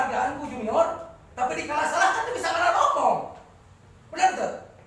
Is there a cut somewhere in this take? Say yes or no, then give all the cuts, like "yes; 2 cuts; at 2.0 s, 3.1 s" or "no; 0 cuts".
yes; 1 cut; at 3.5 s